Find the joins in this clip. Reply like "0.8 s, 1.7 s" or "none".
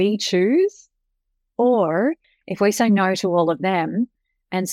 2.3 s